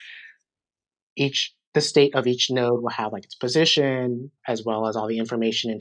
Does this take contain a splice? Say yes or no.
yes